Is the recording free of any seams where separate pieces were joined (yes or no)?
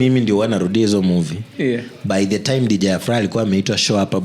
yes